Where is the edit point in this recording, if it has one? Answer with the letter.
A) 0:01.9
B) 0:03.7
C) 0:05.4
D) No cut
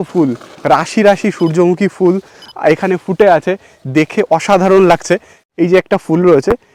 C